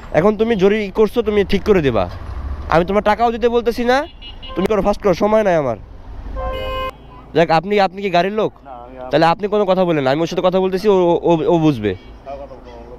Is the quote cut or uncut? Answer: cut